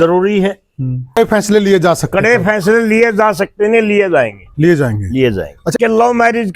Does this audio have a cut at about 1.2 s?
yes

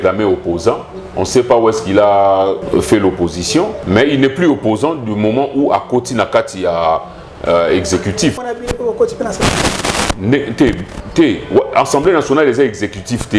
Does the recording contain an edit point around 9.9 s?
no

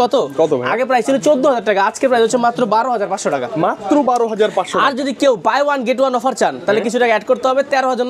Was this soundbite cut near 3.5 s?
no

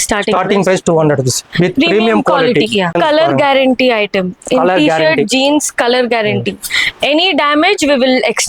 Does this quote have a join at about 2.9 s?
yes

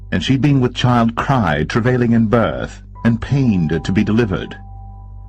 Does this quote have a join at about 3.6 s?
no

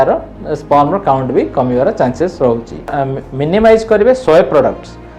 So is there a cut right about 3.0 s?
yes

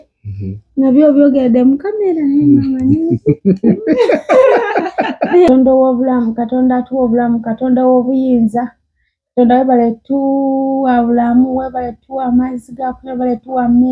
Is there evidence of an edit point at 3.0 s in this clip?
no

